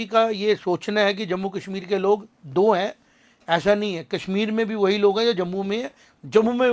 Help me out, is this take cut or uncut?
uncut